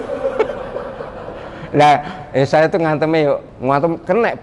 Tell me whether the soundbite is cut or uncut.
cut